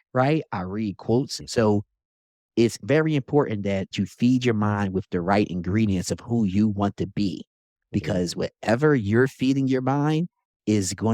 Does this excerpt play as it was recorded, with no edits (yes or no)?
no